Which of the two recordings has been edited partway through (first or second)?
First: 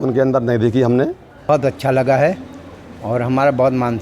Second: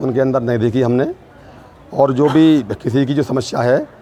first